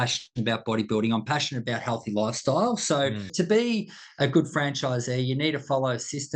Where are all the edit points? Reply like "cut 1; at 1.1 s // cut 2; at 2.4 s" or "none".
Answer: cut 1; at 3.2 s